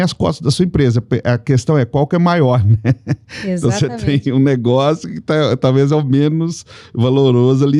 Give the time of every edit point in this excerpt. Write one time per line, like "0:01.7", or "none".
none